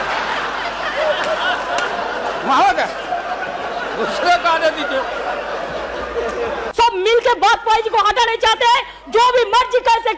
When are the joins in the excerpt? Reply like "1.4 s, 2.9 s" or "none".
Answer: 6.6 s